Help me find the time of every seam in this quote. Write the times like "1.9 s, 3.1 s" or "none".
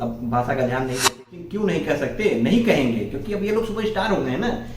1.2 s